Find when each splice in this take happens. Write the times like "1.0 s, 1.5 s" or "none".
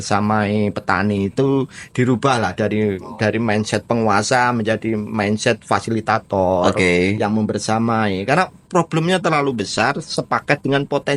none